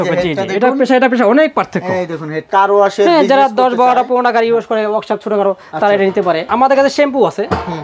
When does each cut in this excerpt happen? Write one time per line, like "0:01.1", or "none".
0:02.5
0:06.4